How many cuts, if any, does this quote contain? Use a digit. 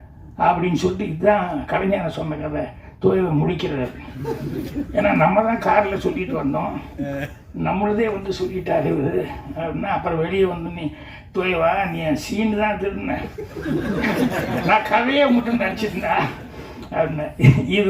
0